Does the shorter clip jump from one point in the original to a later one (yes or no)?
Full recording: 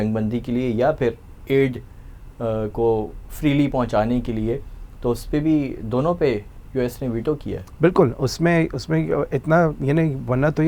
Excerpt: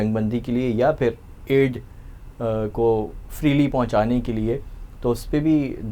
no